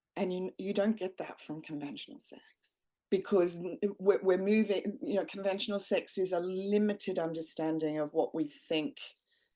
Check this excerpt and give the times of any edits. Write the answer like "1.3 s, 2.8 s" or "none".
none

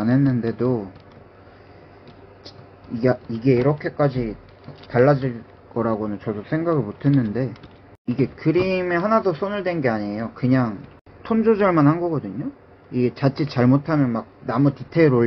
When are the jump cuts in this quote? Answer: none

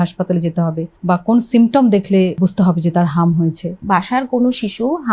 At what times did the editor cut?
0.9 s, 2.4 s, 3.8 s

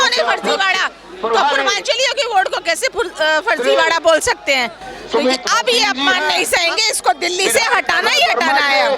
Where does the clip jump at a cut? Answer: none

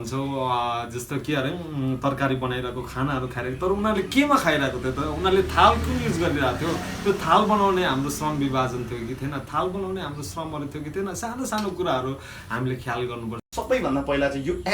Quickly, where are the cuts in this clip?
13.3 s

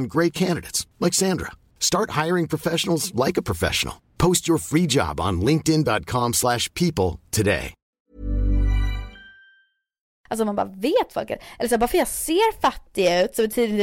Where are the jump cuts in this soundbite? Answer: 10.1 s

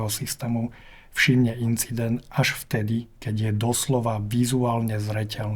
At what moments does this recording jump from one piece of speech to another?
none

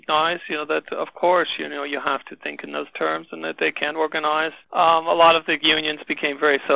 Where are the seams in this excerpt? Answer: 4.6 s

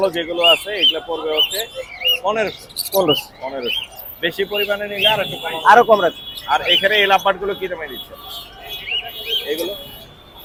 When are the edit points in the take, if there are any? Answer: none

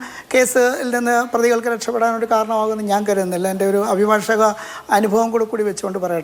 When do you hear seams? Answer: none

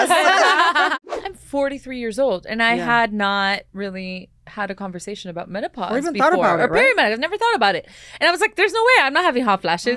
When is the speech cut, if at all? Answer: 0.9 s

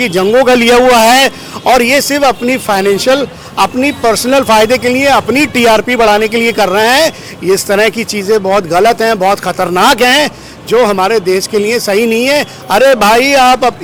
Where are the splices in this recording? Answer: none

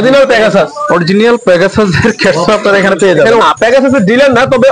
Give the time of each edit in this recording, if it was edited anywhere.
3.4 s

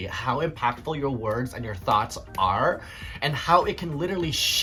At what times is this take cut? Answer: none

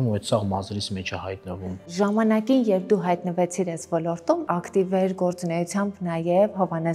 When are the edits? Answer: 1.8 s, 4.4 s

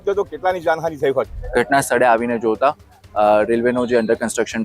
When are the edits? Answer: 1.4 s

